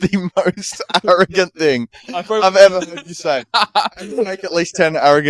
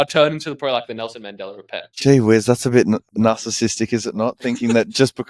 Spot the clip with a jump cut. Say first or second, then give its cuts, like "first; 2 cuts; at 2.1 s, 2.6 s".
second; 2 cuts; at 1.9 s, 3.1 s